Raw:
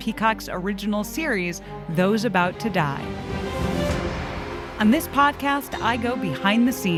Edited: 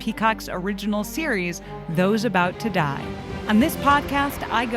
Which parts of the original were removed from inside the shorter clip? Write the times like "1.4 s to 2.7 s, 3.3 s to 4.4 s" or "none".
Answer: 3.3 s to 4.6 s